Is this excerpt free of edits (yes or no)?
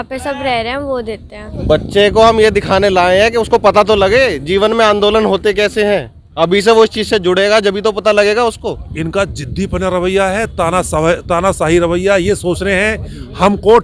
no